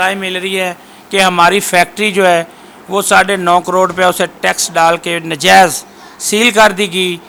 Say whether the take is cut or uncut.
uncut